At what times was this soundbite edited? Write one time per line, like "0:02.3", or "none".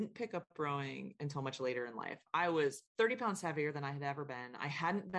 0:02.8